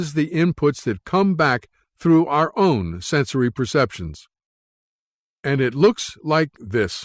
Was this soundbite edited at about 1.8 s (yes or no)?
no